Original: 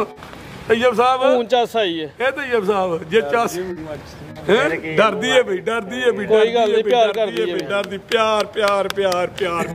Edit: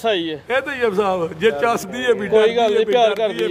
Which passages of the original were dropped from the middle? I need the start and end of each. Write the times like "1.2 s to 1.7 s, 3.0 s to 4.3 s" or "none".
3.6 s to 5.9 s